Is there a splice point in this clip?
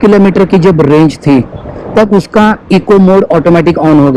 no; 0 cuts

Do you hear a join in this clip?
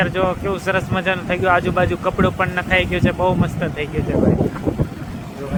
no; 0 cuts

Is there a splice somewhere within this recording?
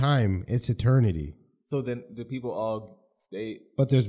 no; 0 cuts

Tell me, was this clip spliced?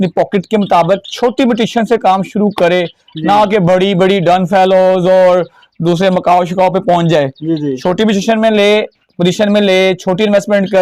no; 0 cuts

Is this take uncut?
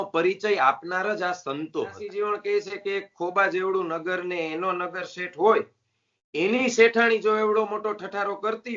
no; 1 cut; at 2.0 s

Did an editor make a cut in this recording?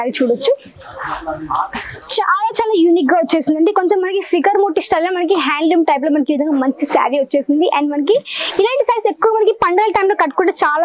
no; 0 cuts

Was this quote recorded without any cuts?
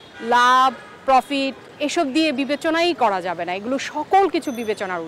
yes; 0 cuts

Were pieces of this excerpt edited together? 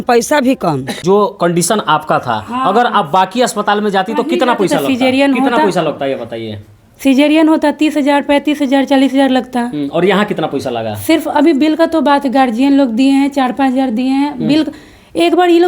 yes; 1 cut; at 0.9 s

